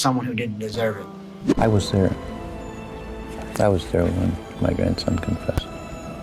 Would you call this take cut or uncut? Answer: cut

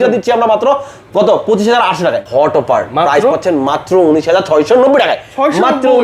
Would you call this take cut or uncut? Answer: cut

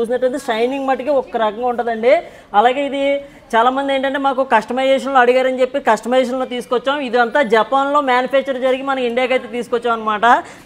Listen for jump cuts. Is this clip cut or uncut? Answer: uncut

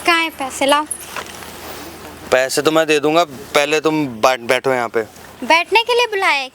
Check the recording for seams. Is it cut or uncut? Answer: uncut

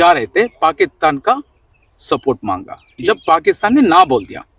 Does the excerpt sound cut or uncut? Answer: uncut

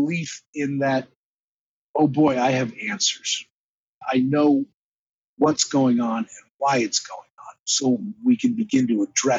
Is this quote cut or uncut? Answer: cut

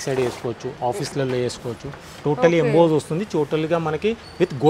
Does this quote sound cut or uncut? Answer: uncut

